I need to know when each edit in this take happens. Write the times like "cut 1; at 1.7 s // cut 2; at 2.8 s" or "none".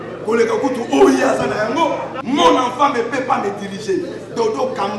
cut 1; at 2.1 s